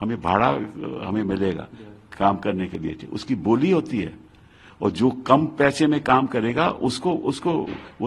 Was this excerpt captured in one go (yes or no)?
yes